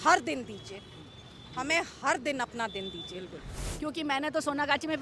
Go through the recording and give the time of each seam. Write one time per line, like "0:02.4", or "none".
0:03.7